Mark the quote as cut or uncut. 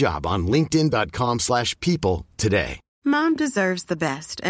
cut